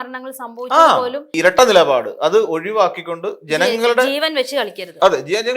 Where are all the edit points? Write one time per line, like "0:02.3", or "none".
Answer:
0:01.3

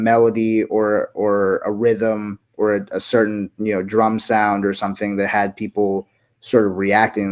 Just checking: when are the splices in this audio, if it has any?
none

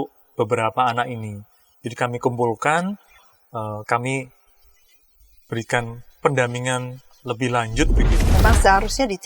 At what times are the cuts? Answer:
0:08.2

